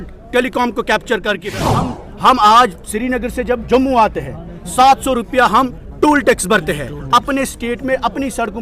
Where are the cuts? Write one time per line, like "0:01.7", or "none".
0:01.7

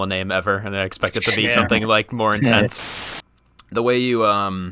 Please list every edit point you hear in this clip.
0:03.0

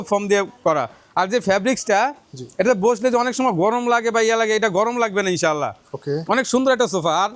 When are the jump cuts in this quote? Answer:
none

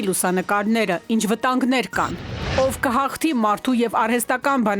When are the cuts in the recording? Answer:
0:02.4

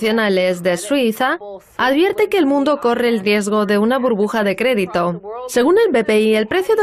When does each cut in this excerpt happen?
0:01.8

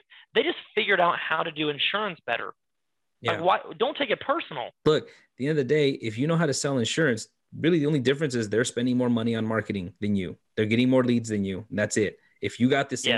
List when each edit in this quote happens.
0:04.8

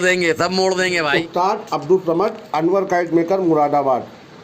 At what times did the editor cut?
0:01.1

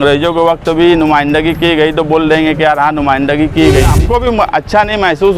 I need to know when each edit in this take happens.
0:04.0

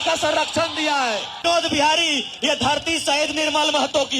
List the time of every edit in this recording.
0:01.4

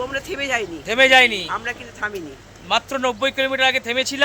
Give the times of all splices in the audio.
none

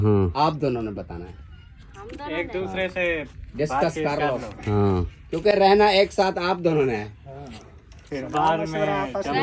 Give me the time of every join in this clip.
none

